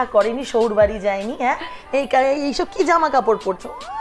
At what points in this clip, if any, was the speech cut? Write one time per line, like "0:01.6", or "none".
none